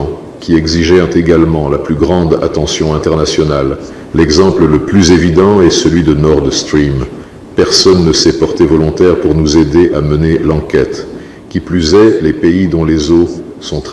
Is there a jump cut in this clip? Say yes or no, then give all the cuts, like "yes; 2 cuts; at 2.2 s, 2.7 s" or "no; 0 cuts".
yes; 2 cuts; at 7.2 s, 11.3 s